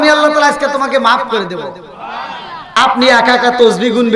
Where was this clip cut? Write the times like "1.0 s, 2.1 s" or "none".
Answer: 2.7 s